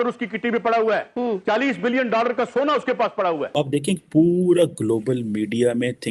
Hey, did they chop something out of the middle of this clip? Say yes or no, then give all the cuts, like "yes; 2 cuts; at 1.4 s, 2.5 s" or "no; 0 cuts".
yes; 1 cut; at 3.5 s